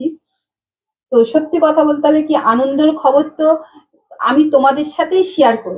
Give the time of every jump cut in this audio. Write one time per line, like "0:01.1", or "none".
none